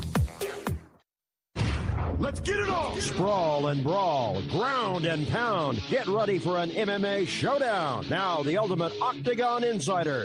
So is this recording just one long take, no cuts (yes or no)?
yes